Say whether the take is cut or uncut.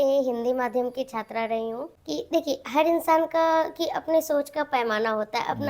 cut